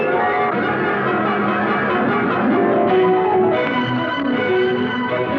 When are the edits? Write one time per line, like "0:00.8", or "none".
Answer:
none